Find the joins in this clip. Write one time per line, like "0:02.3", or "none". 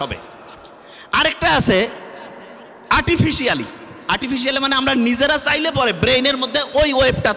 none